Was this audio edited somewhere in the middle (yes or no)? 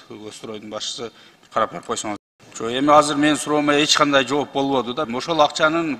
yes